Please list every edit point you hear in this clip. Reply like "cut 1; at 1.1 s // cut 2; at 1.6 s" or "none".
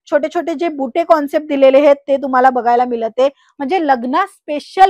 none